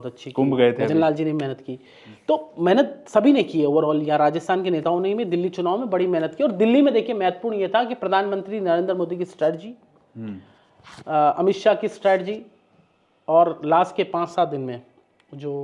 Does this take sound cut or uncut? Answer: uncut